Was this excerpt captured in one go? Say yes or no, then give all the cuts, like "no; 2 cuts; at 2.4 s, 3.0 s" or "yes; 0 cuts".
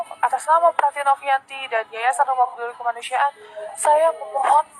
yes; 0 cuts